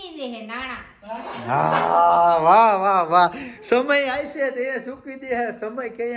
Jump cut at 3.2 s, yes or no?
no